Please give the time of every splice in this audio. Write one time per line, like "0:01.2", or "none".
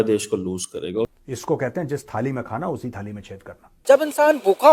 0:01.1
0:03.7